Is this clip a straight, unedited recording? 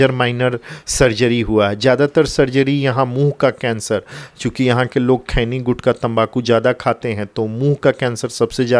yes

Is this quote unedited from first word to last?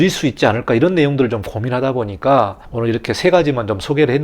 no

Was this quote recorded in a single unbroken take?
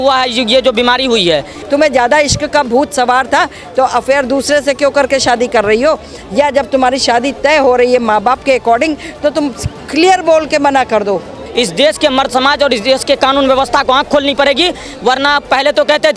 no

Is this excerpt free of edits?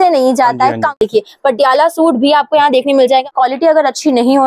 no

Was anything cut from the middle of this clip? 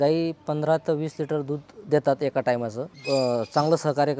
yes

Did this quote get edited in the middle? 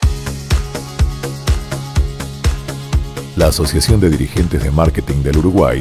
yes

